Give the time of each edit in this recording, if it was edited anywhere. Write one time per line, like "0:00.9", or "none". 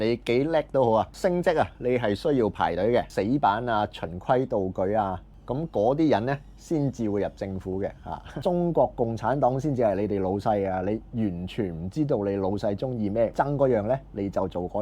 0:03.1
0:08.3
0:13.3